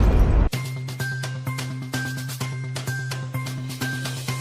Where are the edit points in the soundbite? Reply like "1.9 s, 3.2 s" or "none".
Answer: none

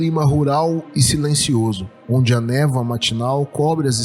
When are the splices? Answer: 1.9 s

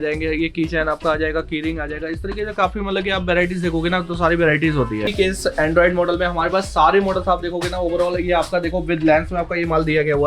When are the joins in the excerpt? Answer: 5.1 s

